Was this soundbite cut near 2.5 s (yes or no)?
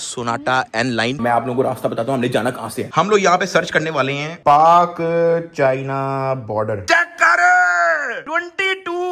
no